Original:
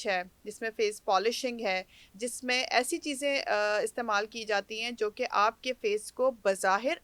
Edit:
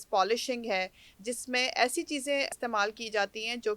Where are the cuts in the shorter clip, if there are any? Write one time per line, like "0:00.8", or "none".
0:02.5